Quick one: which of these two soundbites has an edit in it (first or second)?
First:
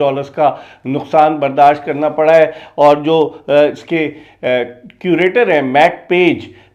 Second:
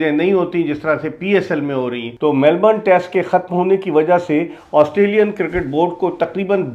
second